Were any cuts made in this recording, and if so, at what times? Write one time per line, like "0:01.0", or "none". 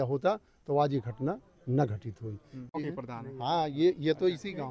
0:02.7